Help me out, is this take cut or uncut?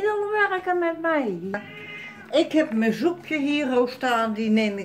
cut